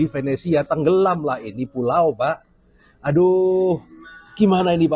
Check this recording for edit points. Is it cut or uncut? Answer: uncut